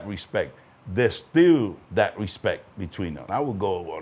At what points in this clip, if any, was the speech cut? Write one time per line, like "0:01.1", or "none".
0:01.8
0:03.2